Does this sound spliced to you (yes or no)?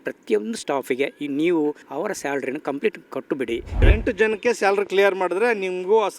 yes